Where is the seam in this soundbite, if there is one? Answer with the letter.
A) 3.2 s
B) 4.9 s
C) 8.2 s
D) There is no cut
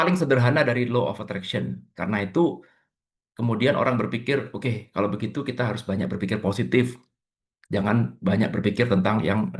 D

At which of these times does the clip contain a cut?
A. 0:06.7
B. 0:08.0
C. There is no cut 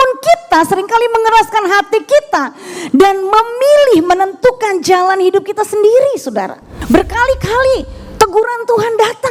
A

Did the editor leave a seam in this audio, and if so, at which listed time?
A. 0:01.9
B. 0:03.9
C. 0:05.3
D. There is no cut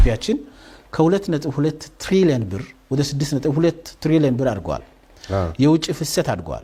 D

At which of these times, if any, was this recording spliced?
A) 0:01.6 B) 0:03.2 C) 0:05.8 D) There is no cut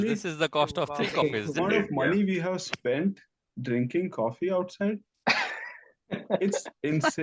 A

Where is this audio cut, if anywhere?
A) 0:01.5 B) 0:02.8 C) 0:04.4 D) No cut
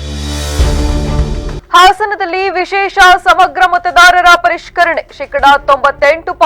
A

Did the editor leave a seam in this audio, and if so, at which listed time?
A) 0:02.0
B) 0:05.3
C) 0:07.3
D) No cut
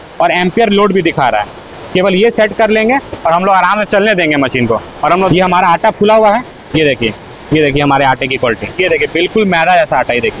B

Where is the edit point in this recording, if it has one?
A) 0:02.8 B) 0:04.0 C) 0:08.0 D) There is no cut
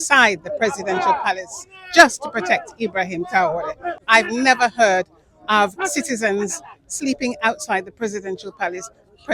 B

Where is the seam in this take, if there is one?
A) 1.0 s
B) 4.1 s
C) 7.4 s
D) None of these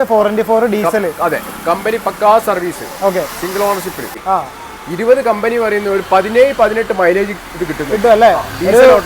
B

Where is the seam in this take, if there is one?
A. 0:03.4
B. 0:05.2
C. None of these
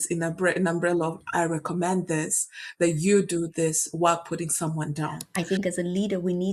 B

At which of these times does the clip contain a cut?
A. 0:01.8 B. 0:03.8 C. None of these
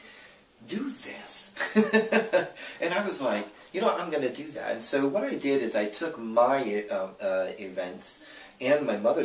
A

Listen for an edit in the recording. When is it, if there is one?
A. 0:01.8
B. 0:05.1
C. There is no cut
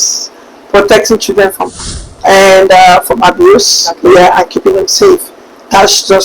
A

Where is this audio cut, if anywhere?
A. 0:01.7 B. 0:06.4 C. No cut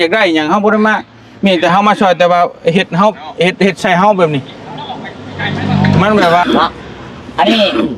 B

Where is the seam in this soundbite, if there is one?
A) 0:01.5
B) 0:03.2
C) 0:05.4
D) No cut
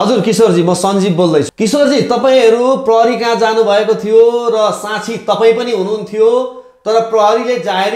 A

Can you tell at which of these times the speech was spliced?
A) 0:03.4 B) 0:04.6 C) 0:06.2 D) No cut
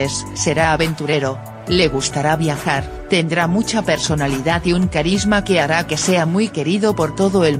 A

